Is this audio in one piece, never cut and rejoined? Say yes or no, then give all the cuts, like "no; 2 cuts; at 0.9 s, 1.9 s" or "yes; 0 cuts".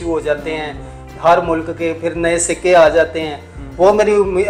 yes; 0 cuts